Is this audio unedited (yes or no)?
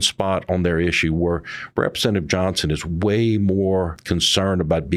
no